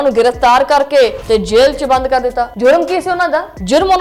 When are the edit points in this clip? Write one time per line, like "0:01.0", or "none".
0:01.2